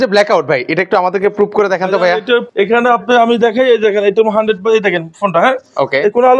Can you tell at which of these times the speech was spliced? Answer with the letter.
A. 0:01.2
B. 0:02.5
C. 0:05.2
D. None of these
B